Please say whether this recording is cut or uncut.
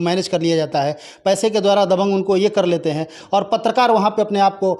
uncut